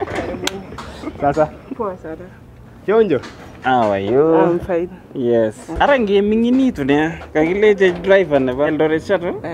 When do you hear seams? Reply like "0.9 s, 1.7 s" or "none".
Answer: 5.7 s